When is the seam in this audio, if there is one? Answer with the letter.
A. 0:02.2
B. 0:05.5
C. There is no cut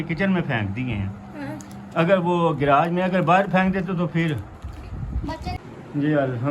B